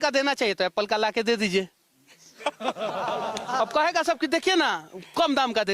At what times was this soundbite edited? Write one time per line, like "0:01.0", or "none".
none